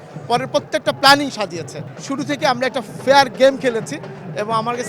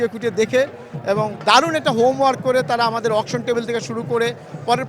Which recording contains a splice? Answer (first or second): first